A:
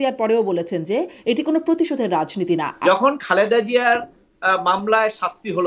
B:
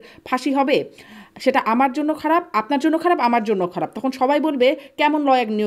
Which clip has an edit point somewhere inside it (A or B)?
A